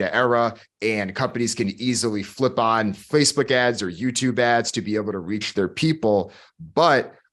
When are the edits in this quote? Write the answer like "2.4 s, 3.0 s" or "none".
none

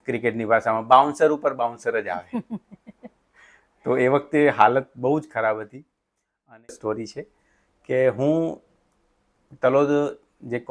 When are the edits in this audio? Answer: 6.7 s

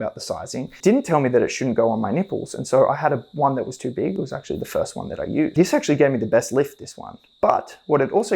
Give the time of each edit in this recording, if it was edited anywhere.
0.8 s, 5.5 s

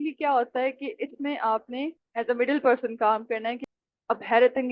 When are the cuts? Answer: 3.6 s

